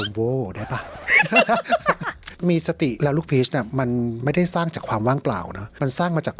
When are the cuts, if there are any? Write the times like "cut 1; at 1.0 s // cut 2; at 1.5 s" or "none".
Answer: cut 1; at 2.3 s